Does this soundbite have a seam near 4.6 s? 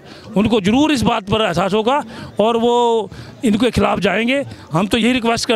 no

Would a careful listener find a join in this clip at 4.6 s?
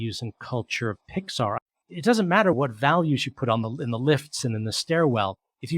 no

